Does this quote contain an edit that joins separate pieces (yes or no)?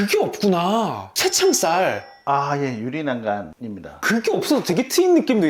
no